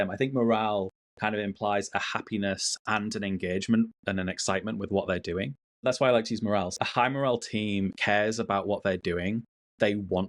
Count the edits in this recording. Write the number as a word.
three